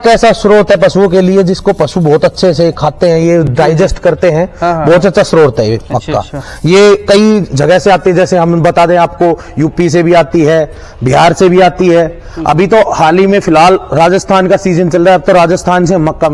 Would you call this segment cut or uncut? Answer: uncut